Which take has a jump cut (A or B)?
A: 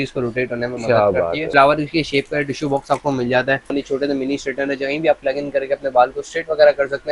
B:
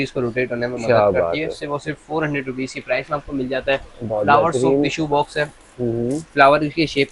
A